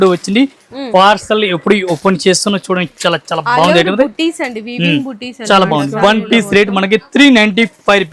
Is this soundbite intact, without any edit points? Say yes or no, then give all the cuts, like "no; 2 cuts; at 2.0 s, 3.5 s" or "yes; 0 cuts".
yes; 0 cuts